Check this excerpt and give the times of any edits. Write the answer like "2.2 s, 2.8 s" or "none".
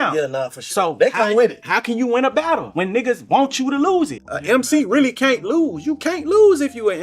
4.1 s